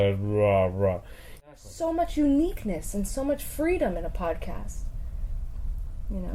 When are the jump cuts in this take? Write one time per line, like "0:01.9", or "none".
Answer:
0:01.5